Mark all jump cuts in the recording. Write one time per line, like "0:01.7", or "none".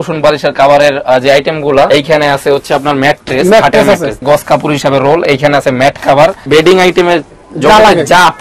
0:01.9
0:04.2
0:06.4